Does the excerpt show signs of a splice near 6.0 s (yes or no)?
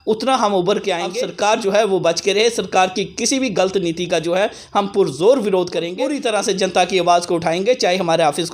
yes